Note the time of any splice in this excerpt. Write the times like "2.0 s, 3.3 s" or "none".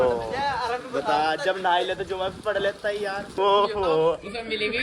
3.3 s